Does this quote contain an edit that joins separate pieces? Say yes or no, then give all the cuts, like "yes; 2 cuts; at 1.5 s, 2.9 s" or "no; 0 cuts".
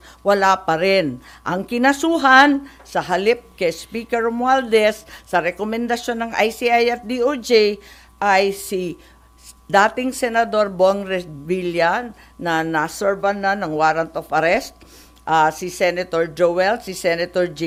no; 0 cuts